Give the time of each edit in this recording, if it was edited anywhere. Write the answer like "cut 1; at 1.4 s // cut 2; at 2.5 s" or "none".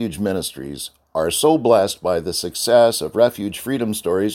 none